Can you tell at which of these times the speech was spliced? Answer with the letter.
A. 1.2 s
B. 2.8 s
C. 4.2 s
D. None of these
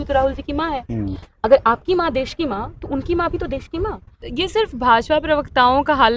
C